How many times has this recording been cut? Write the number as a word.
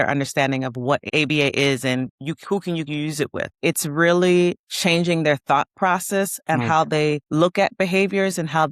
three